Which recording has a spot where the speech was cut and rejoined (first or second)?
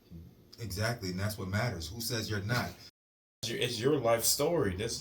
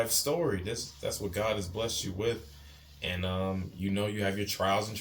first